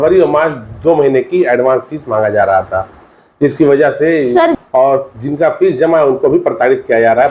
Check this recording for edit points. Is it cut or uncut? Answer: cut